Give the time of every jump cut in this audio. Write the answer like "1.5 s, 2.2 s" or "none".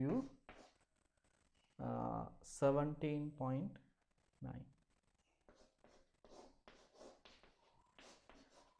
7.7 s

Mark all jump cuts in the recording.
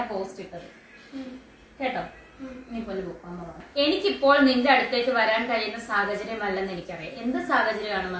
3.6 s

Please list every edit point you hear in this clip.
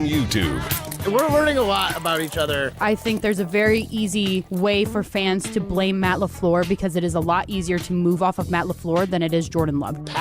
0.9 s

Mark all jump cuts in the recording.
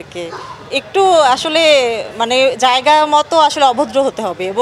none

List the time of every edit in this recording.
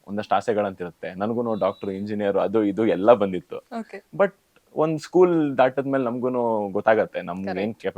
none

